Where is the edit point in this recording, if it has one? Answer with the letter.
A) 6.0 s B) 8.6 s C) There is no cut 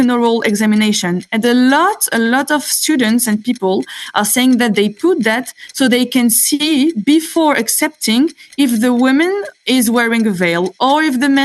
C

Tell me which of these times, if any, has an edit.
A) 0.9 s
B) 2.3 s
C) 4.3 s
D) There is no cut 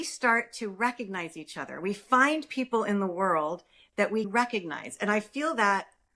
C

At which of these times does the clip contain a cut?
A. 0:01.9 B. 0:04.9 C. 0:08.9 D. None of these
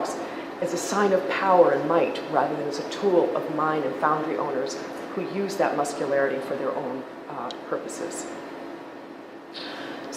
A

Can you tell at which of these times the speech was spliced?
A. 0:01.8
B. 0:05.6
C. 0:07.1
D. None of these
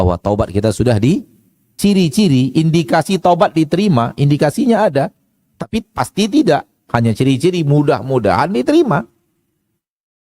A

